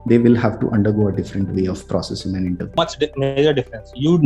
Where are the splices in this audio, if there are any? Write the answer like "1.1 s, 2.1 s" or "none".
2.7 s